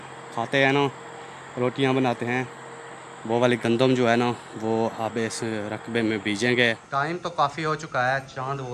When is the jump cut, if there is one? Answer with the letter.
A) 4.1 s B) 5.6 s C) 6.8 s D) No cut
C